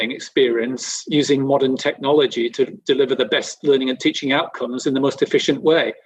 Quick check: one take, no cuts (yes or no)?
yes